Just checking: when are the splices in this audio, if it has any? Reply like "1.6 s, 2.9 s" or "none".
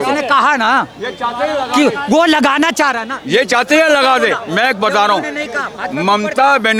none